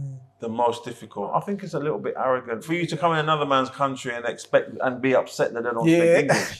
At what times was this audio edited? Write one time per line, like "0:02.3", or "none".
0:01.3
0:02.7